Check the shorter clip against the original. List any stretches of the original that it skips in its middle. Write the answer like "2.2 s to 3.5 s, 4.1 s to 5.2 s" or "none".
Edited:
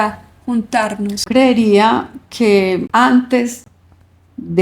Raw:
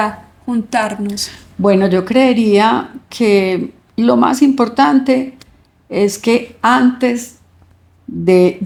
1.3 s to 2.1 s, 3.7 s to 6.6 s